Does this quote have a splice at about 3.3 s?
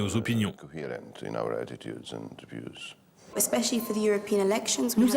yes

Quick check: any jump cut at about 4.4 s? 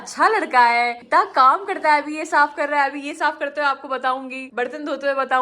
yes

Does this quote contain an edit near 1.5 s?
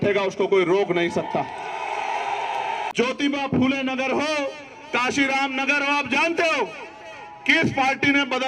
no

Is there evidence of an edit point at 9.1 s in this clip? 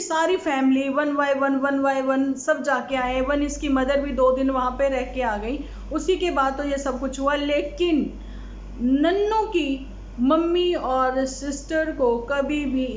no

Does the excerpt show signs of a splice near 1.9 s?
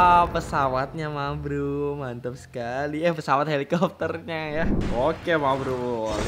no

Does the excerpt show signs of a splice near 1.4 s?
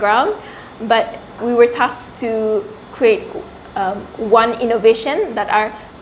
yes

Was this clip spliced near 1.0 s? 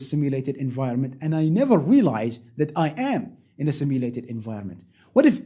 yes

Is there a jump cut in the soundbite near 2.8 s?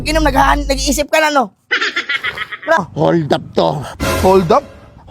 yes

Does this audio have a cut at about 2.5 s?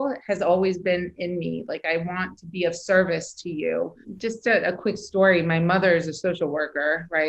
no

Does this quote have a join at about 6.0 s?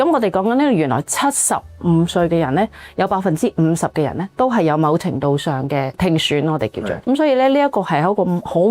yes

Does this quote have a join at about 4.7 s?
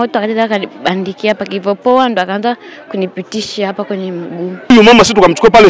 yes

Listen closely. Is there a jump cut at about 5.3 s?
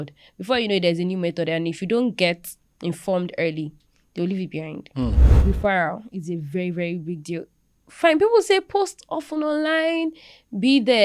yes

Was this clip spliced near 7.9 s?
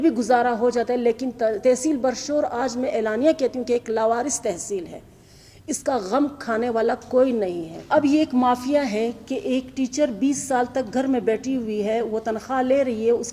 yes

